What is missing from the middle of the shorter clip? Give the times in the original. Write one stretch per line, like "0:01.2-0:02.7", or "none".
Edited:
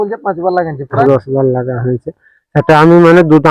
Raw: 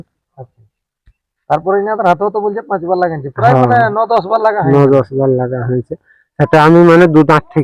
0:03.5-0:04.9